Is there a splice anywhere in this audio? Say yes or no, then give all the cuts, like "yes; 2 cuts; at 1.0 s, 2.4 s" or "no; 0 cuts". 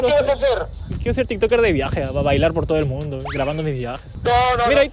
no; 0 cuts